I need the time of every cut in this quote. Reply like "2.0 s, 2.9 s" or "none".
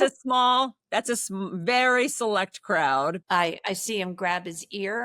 3.2 s